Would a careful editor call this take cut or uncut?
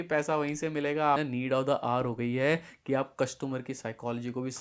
cut